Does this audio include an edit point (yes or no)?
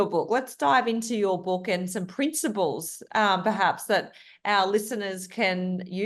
no